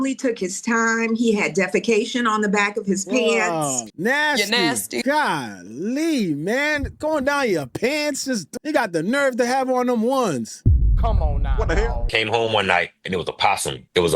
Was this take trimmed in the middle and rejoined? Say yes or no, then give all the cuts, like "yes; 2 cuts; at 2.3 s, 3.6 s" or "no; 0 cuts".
yes; 2 cuts; at 3.9 s, 11.9 s